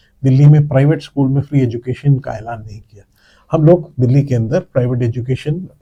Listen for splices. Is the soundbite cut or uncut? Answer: uncut